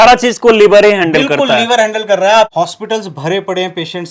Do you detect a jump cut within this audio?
yes; 1 cut; at 2.5 s

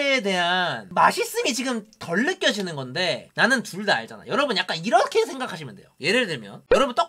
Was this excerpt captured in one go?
yes; 0 cuts

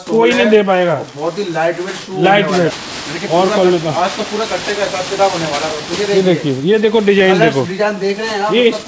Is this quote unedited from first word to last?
no; 1 cut; at 2.8 s

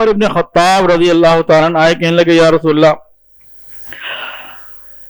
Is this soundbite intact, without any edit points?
yes; 0 cuts

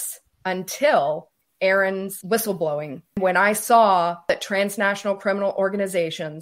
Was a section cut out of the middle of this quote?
yes; 4 cuts; at 1.3 s, 2.2 s, 3.2 s, 4.3 s

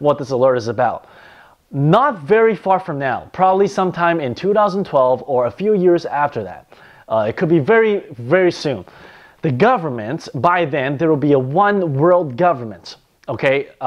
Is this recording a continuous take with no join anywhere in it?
no; 1 cut; at 8.6 s

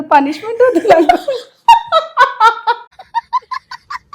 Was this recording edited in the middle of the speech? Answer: yes; 1 cut; at 2.9 s

